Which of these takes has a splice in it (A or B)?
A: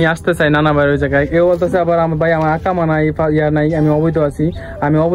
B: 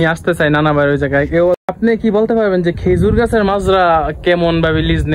B